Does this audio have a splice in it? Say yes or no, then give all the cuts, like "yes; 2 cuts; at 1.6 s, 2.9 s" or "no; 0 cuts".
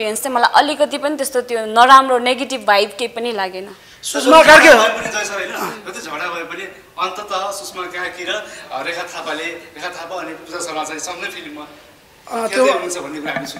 no; 0 cuts